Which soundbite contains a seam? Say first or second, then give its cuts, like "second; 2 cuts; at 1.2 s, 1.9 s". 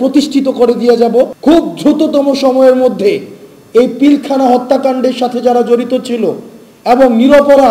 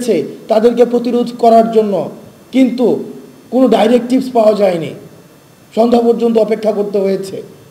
first; 1 cut; at 1.3 s